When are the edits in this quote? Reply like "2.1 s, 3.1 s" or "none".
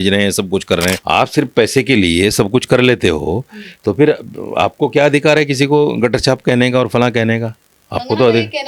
1.0 s